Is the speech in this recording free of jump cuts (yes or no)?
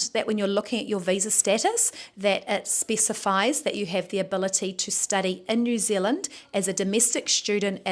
yes